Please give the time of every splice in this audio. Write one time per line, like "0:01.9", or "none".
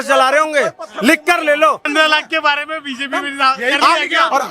0:01.9